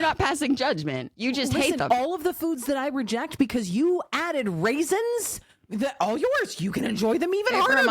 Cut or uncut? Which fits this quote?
cut